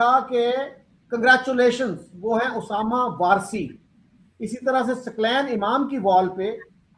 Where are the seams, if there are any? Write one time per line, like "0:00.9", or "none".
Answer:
none